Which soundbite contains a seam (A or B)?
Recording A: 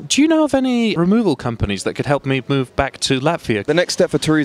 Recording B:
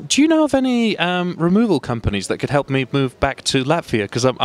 A